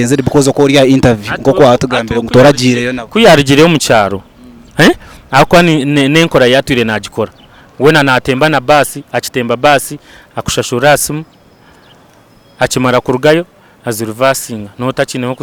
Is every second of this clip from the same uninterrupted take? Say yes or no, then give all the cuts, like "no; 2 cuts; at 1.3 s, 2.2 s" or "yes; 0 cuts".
yes; 0 cuts